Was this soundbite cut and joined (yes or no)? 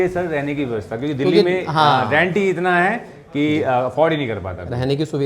no